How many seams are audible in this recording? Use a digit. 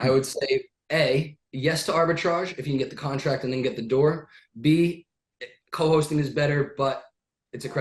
0